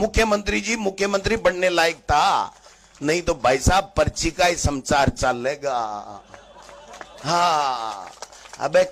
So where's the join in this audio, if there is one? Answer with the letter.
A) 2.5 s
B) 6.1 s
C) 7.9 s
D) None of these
D